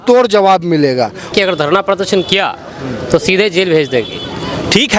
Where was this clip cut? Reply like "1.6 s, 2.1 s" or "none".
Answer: 1.3 s